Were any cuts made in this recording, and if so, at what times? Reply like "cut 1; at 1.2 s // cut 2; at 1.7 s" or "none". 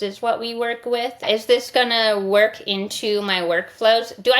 cut 1; at 1.2 s